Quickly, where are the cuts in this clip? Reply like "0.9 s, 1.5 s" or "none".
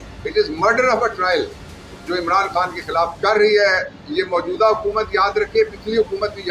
3.1 s